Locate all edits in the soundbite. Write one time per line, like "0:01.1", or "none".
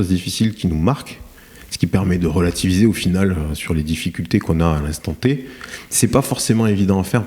none